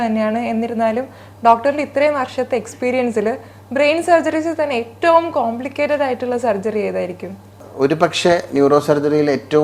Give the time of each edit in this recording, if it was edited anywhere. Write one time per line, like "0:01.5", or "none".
0:07.6